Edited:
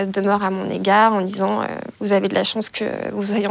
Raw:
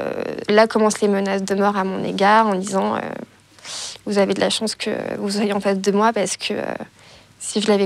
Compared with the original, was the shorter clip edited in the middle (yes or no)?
yes